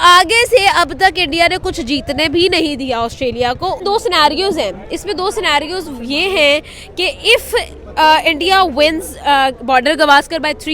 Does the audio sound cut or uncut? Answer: cut